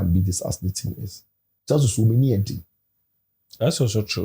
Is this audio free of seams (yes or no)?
yes